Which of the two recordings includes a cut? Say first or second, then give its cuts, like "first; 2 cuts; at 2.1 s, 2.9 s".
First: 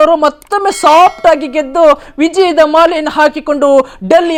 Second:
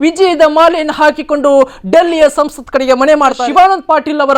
second; 1 cut; at 3.4 s